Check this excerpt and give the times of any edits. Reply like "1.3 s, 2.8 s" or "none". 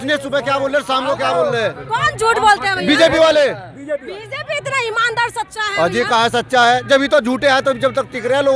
none

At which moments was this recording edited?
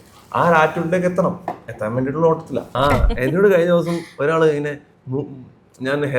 2.7 s

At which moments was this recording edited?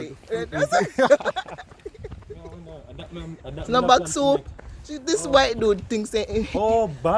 2.7 s

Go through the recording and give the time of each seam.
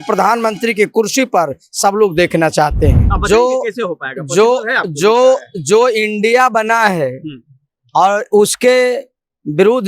3.1 s

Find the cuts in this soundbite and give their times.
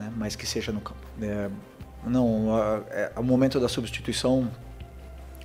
1.0 s

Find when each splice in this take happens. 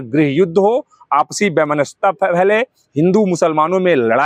none

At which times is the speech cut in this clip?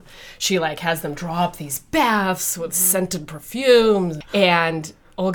4.2 s

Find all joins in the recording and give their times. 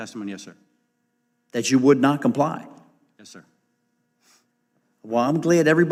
none

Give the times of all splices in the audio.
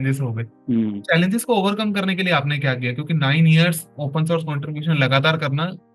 none

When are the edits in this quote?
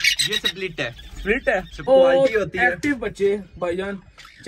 1.9 s

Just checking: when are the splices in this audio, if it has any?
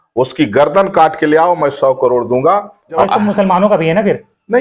3.0 s

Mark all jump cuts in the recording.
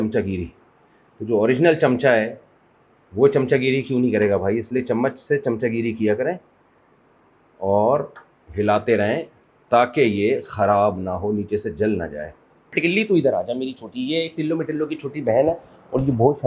12.8 s

